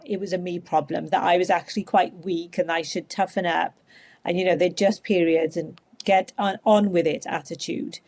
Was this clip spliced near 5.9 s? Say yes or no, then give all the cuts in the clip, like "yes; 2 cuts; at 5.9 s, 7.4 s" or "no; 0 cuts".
yes; 1 cut; at 5.9 s